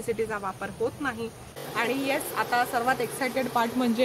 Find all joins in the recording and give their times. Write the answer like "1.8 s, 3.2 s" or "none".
1.5 s